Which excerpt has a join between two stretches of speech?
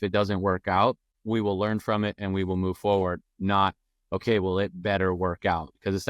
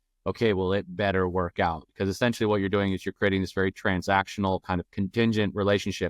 first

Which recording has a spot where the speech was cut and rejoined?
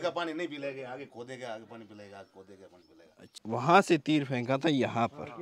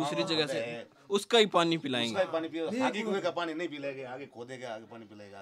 first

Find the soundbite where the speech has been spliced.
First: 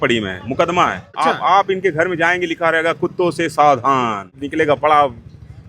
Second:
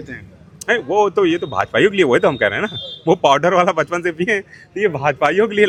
first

